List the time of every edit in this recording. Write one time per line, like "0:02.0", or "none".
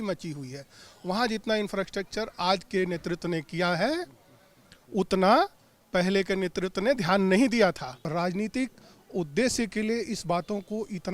0:08.0